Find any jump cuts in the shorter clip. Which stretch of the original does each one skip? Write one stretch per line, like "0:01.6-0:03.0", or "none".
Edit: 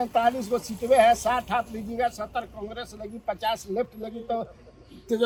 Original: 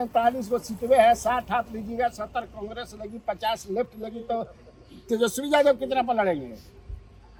none